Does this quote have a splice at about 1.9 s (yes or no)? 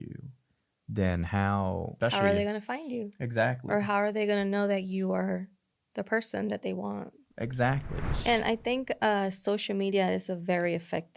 yes